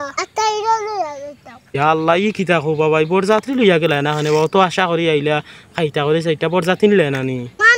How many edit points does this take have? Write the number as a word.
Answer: zero